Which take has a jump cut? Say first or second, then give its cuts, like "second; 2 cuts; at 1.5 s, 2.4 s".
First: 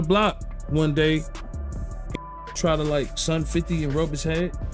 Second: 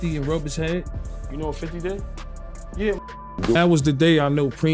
second; 1 cut; at 3.6 s